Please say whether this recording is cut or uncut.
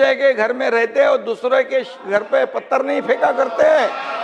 uncut